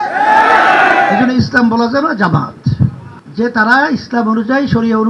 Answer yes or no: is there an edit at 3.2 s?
yes